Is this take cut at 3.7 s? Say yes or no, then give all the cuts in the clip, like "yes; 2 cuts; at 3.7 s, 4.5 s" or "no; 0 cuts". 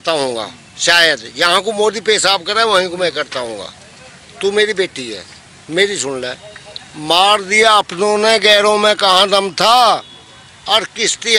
no; 0 cuts